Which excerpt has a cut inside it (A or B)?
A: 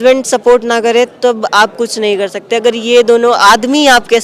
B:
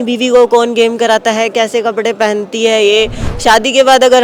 B